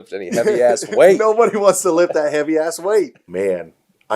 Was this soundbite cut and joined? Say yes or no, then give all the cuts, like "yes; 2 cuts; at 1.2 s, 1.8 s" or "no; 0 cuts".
yes; 1 cut; at 3.2 s